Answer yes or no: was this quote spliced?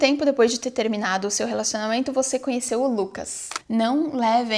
yes